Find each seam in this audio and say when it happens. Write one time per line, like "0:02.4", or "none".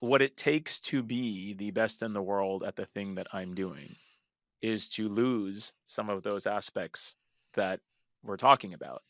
none